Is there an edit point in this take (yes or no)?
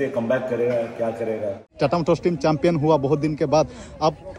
yes